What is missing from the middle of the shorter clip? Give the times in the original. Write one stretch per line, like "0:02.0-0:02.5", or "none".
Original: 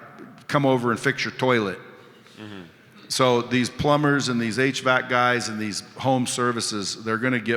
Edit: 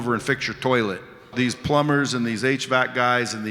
0:02.1-0:03.5